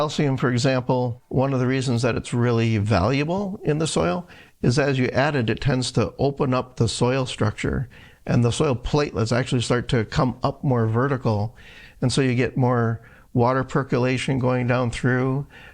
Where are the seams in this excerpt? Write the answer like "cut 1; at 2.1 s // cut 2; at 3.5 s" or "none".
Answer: cut 1; at 1.2 s